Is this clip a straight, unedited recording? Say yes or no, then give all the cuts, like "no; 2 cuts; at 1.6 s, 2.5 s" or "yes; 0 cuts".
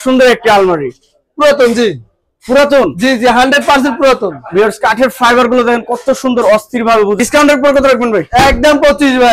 no; 1 cut; at 7.2 s